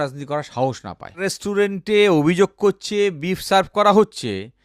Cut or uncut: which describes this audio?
cut